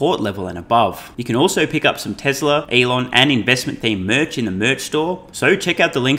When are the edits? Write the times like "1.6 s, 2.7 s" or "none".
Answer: 1.1 s, 2.7 s, 5.3 s